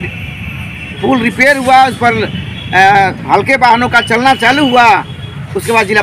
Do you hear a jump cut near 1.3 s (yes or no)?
no